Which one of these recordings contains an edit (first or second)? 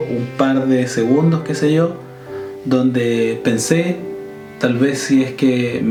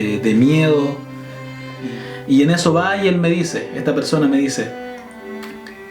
second